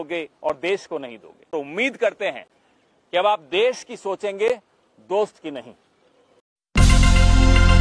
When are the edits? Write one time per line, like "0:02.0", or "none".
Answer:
0:01.5